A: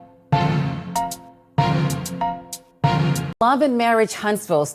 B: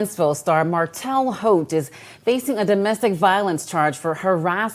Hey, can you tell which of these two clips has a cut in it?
A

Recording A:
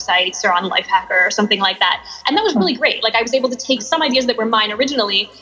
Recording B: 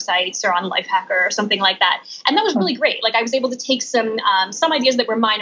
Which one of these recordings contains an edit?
A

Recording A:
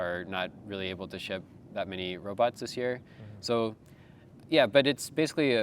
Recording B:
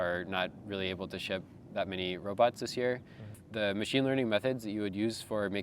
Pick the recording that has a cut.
B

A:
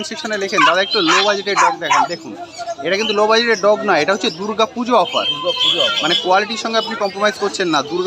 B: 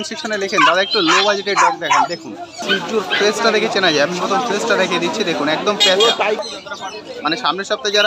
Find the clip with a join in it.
B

